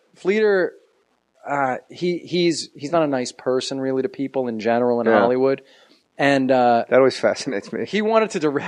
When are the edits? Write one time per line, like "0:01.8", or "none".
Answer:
none